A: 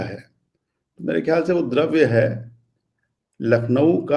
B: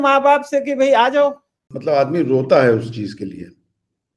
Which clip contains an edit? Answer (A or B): B